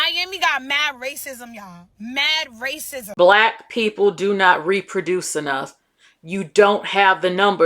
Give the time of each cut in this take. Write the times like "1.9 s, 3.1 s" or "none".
3.0 s

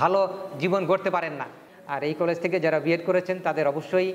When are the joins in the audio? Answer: 1.7 s

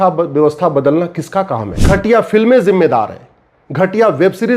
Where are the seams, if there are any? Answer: 1.7 s

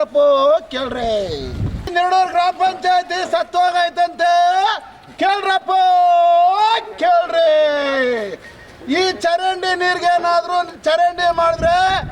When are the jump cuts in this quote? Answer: 1.9 s

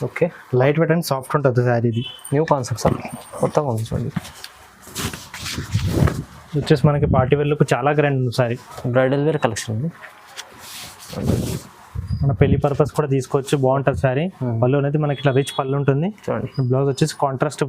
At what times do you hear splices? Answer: 8.7 s

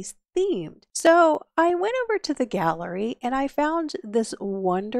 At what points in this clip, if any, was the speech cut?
1.1 s

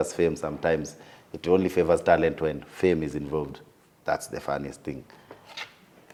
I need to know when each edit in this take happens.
none

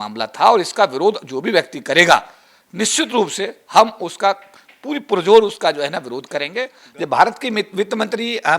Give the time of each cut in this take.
6.8 s

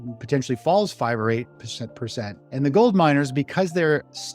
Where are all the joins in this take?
2.4 s

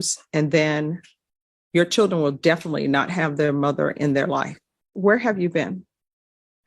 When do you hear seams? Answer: 4.8 s

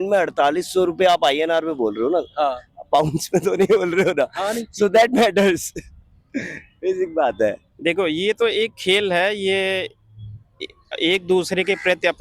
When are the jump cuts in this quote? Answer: 7.7 s

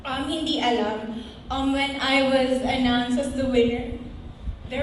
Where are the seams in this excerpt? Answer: none

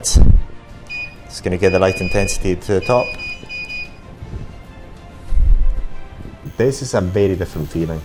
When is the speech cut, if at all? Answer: 6.3 s

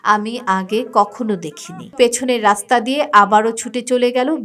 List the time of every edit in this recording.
1.9 s

